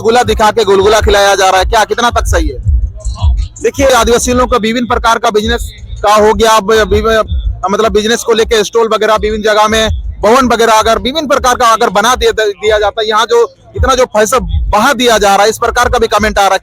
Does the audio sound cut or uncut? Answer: cut